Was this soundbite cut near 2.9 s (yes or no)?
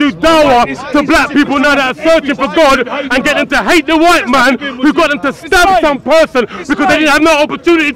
no